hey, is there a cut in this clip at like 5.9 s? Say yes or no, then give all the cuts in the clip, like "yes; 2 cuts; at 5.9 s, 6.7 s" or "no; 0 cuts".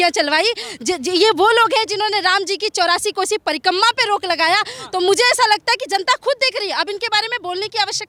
no; 0 cuts